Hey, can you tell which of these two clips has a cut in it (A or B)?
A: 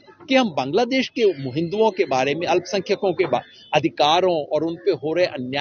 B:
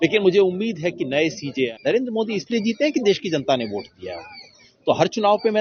B